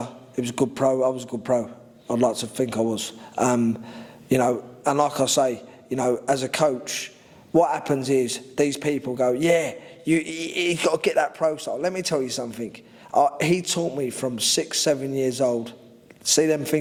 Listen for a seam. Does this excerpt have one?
no; 0 cuts

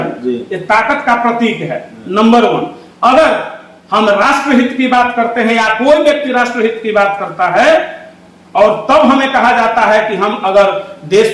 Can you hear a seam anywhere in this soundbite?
no; 0 cuts

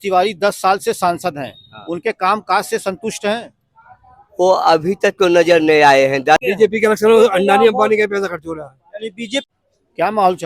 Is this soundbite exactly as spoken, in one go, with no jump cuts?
no; 2 cuts; at 6.4 s, 9.5 s

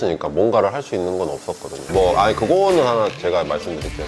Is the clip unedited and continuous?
no; 1 cut; at 1.8 s

